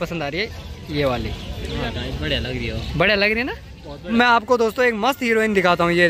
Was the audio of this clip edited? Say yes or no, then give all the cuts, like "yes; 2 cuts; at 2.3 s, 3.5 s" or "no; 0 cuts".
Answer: yes; 1 cut; at 4.0 s